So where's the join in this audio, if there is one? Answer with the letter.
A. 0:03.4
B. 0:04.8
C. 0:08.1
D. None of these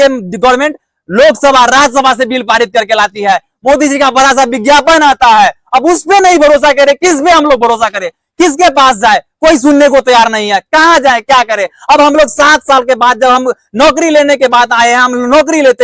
D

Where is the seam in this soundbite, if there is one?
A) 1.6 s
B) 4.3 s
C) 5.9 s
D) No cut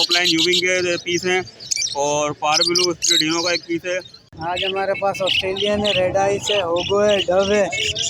B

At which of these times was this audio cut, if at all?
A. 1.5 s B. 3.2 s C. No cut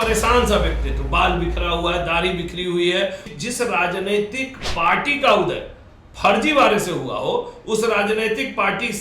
B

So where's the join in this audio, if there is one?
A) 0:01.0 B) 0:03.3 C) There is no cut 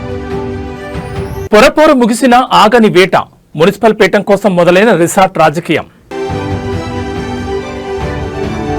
C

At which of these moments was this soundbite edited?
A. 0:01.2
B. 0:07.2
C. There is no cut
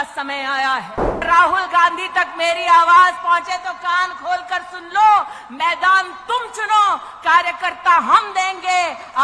A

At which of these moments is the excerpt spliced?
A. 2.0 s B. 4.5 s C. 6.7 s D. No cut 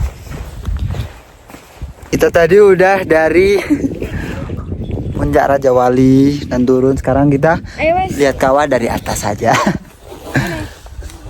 A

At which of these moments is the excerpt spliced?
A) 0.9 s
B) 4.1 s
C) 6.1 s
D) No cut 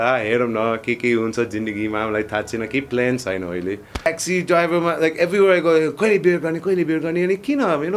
B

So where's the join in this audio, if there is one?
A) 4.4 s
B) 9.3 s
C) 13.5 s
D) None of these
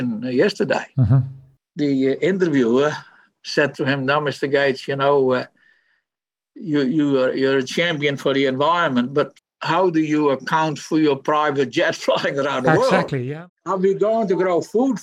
C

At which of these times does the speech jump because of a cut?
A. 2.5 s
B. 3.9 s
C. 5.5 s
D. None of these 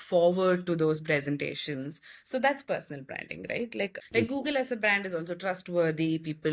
B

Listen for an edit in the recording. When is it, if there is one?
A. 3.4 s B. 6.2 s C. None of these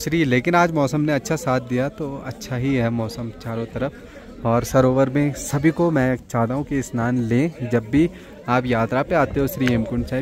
C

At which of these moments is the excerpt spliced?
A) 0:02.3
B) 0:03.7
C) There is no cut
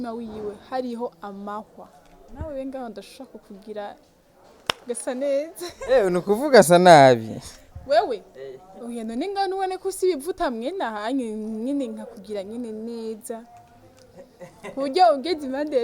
A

